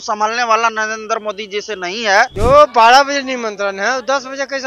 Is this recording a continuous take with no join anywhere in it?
no; 1 cut; at 2.3 s

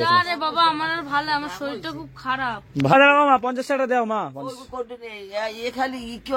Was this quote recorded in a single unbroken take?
no; 1 cut; at 2.9 s

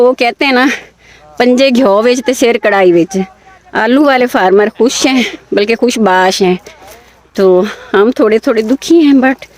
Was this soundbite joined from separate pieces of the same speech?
no; 0 cuts

